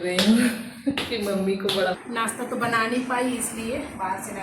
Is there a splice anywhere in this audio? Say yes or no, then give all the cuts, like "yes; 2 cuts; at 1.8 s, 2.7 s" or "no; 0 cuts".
yes; 1 cut; at 2.0 s